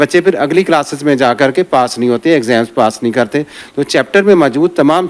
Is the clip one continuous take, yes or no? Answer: no